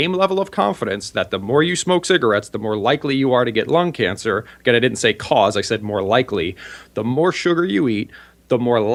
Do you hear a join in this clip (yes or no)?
no